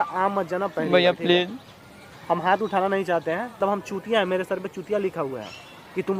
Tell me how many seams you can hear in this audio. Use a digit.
1